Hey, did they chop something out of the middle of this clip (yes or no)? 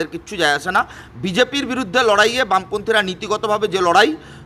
no